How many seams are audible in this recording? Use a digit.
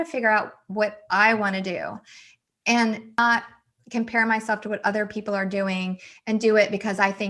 1